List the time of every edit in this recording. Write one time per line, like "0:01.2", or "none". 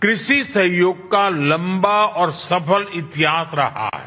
0:02.5